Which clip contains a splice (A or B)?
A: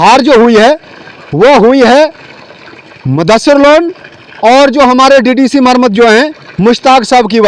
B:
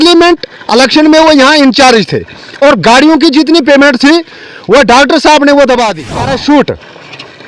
B